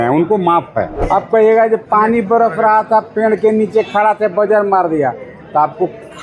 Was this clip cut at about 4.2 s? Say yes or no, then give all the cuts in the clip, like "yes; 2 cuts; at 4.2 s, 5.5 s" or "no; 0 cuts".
no; 1 cut; at 0.9 s